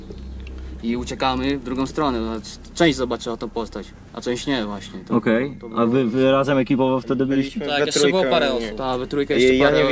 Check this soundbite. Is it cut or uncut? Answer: uncut